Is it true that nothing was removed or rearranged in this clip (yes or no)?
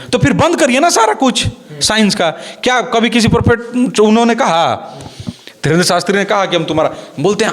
yes